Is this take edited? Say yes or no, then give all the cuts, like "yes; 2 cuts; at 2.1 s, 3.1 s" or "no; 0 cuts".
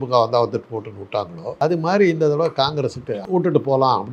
yes; 2 cuts; at 1.6 s, 3.2 s